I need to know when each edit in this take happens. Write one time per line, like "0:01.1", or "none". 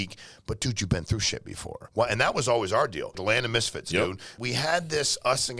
0:01.8
0:03.2
0:04.4